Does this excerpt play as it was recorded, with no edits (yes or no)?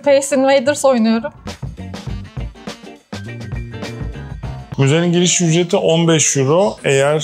yes